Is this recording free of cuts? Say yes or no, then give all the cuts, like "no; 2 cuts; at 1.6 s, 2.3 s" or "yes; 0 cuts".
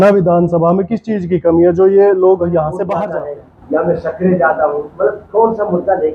no; 1 cut; at 3.0 s